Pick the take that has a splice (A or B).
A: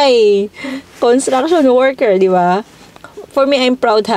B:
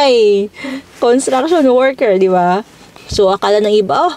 B